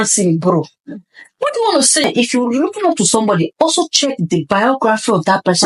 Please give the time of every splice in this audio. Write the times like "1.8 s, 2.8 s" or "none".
2.0 s